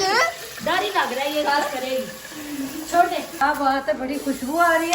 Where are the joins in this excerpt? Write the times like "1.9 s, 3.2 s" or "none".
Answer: 3.4 s